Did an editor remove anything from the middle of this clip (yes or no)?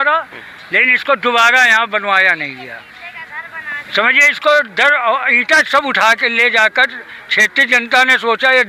no